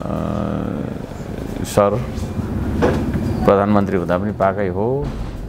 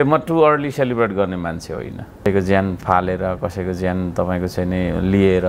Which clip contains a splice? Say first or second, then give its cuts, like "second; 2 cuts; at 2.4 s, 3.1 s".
second; 1 cut; at 2.3 s